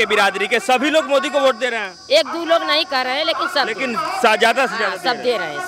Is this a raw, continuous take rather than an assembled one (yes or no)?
yes